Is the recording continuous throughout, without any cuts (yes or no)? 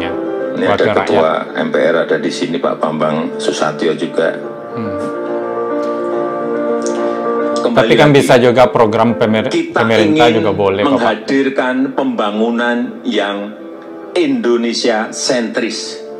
yes